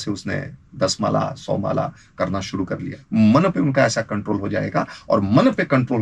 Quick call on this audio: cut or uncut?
cut